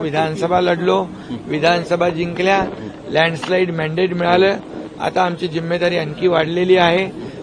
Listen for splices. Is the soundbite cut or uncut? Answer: uncut